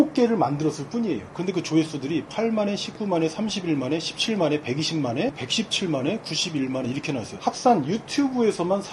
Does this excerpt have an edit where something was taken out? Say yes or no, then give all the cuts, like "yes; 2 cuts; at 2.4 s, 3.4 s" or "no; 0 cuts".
no; 0 cuts